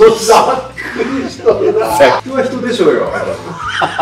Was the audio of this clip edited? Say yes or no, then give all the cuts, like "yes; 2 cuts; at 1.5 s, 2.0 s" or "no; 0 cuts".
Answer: yes; 1 cut; at 2.2 s